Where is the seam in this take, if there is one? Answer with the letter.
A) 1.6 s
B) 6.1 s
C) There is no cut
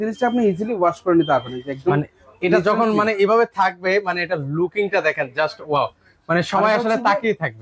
C